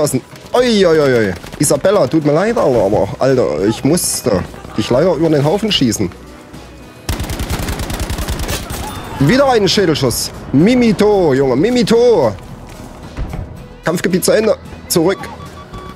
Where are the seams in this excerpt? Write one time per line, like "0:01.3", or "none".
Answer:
none